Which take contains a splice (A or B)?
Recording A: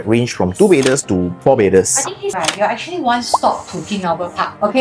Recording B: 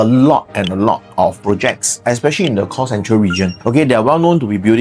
A